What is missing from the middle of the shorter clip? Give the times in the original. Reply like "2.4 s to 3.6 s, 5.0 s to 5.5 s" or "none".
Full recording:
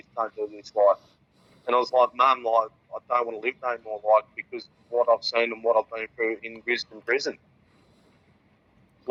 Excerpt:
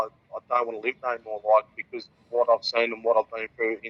none